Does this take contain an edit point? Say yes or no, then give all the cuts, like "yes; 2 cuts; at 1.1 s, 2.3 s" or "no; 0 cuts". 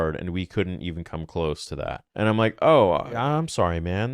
yes; 2 cuts; at 2.0 s, 3.1 s